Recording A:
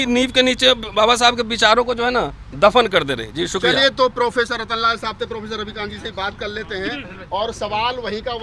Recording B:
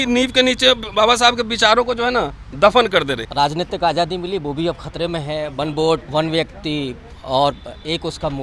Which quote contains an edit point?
B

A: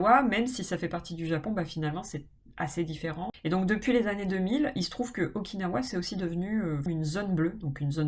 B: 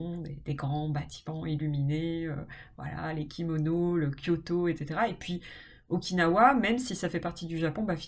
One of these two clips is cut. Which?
A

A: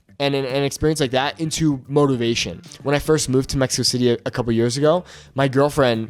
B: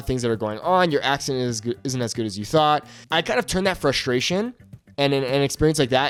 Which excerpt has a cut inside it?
A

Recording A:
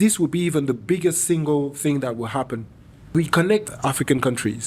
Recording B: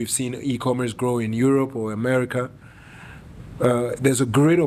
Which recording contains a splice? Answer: A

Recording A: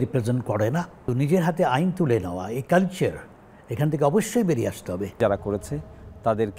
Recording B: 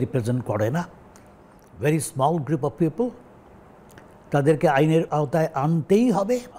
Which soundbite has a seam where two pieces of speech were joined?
A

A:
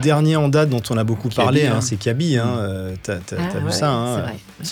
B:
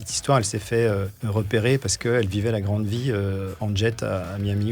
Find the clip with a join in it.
B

